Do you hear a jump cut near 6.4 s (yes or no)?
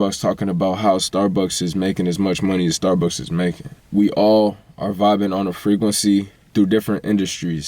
yes